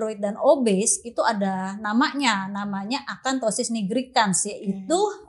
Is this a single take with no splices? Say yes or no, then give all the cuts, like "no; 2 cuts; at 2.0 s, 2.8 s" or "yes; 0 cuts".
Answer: yes; 0 cuts